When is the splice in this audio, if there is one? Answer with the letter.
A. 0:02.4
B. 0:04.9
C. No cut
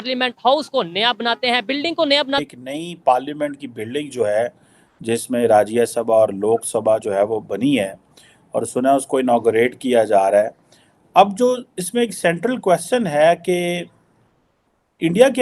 A